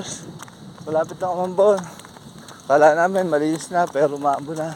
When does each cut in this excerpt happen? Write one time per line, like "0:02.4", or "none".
none